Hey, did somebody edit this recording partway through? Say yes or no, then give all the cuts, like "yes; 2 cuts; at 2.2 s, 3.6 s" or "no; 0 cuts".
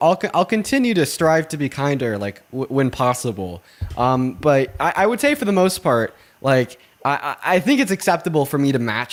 no; 0 cuts